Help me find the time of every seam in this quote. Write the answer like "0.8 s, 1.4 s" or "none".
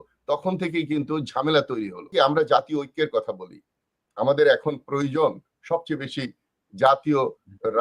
2.1 s